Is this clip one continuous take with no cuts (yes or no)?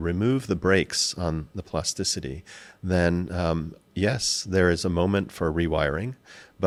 yes